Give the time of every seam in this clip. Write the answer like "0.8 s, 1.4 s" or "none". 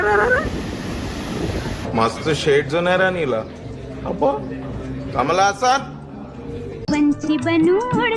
1.8 s, 6.8 s